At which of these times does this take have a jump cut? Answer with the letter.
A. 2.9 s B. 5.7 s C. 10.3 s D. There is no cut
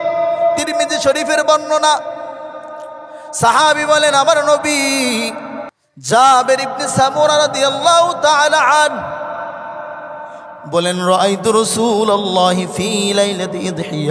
B